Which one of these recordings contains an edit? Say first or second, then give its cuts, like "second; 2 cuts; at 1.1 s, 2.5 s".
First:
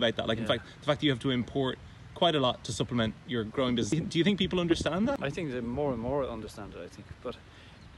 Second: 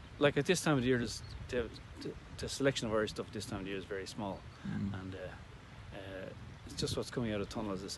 first; 2 cuts; at 3.9 s, 5.2 s